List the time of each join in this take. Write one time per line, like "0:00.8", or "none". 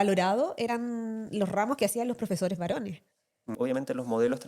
0:03.5